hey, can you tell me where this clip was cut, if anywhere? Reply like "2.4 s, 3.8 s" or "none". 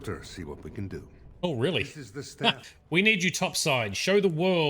2.7 s